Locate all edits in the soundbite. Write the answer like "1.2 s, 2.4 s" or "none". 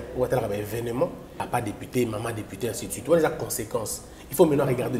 1.3 s